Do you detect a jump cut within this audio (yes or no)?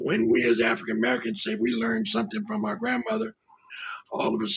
no